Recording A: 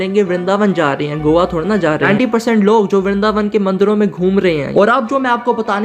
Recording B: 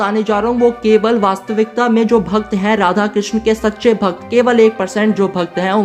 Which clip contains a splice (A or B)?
A